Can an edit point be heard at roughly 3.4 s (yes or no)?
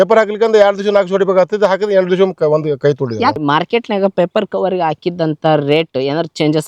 yes